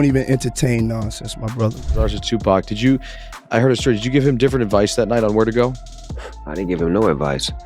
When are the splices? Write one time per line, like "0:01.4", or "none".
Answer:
0:02.1